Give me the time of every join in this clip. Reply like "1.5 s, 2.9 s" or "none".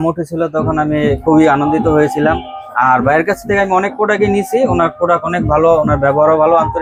none